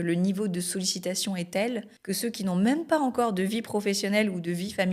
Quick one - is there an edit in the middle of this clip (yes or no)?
yes